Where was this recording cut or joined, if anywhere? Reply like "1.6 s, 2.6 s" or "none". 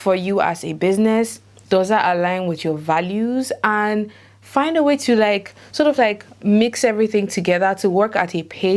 none